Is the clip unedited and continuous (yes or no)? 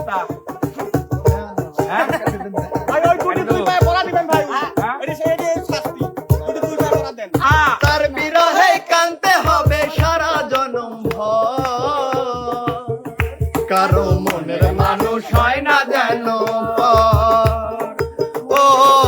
no